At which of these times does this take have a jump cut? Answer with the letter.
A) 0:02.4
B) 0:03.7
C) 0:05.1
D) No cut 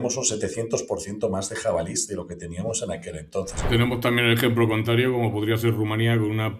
B